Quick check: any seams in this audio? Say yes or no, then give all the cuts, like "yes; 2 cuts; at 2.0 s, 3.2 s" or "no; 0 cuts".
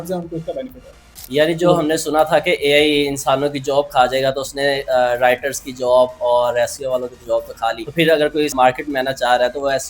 yes; 3 cuts; at 1.0 s, 7.8 s, 8.5 s